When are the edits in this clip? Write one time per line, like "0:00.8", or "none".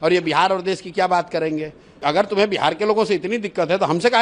0:02.0